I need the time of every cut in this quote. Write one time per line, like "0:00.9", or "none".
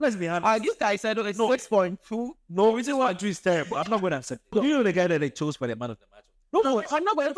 0:04.5
0:06.3